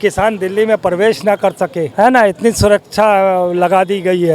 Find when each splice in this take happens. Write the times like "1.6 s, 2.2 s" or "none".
none